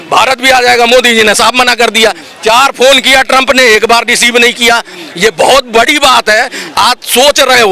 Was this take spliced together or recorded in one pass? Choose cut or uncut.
uncut